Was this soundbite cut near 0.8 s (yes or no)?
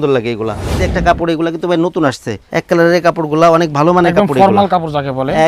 yes